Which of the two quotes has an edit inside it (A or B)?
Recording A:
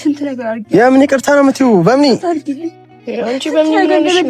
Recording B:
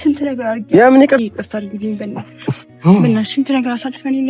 B